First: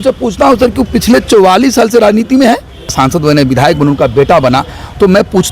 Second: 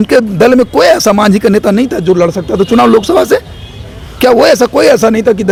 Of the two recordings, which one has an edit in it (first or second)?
first